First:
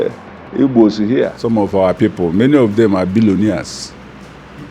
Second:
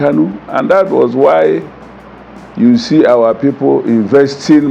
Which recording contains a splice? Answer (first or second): first